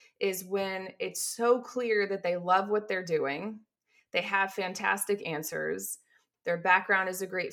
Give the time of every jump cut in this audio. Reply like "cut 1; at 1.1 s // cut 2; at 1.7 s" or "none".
cut 1; at 6.2 s